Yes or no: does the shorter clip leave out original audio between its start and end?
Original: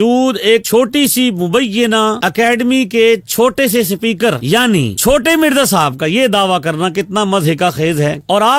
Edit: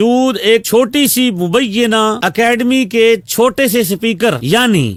no